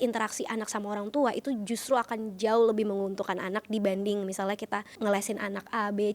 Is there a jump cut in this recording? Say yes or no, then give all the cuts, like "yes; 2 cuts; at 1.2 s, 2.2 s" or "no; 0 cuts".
yes; 1 cut; at 4.9 s